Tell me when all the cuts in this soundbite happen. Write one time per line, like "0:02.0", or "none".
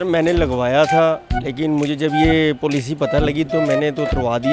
none